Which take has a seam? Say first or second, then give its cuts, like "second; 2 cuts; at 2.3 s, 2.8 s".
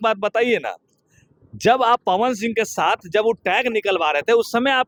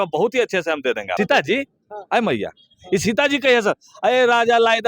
second; 1 cut; at 1.1 s